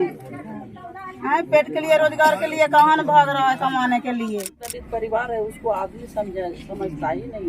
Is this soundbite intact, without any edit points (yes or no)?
no